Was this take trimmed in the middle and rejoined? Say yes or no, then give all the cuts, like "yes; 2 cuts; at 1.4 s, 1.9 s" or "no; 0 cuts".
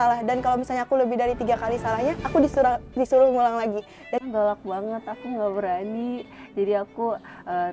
yes; 1 cut; at 4.2 s